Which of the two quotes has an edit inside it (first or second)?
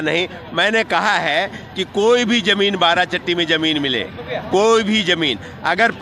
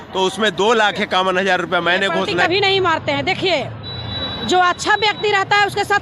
second